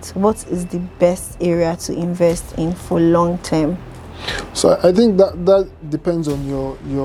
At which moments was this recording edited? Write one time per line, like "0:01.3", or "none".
none